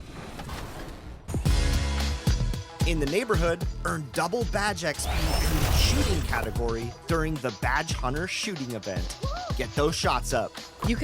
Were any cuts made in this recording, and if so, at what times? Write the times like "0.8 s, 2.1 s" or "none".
1.2 s